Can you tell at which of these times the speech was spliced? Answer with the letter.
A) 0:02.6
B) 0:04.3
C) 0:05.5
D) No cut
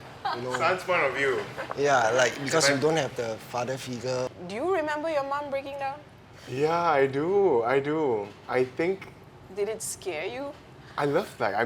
B